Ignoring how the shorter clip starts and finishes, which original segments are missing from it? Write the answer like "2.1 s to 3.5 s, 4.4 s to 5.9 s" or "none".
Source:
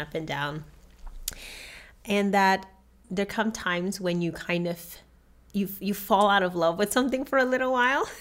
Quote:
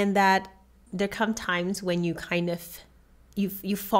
none

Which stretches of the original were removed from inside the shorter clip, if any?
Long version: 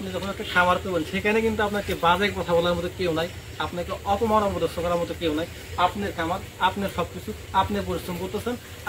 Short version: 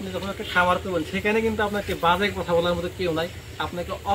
none

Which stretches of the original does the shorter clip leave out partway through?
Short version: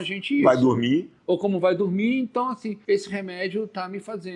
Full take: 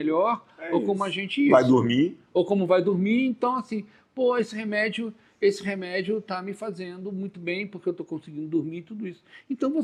3.8 s to 5.3 s

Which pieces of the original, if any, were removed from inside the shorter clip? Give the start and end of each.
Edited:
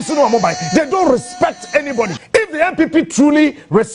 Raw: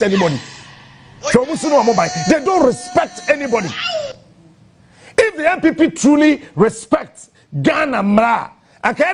4.1 s to 5.4 s

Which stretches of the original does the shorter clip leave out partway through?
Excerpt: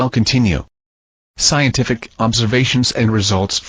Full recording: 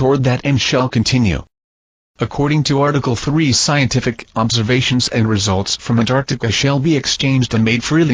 2.2 s to 3.6 s

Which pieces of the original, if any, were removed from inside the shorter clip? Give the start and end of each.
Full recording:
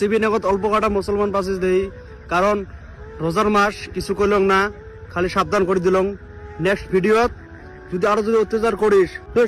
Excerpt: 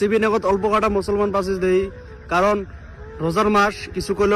none

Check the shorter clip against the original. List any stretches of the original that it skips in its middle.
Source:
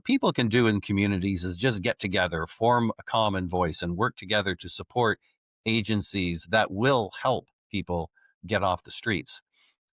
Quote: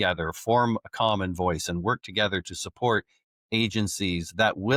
none

